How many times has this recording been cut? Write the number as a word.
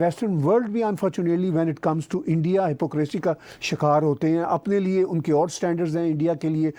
zero